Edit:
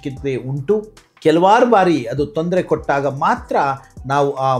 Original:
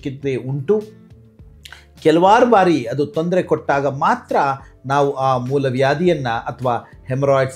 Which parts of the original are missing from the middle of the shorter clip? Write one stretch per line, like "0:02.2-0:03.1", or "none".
0:01.0-0:01.8